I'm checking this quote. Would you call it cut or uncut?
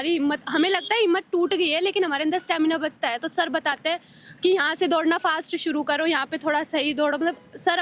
uncut